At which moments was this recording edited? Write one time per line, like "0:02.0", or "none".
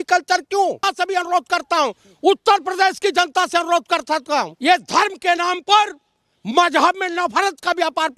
0:00.9
0:04.5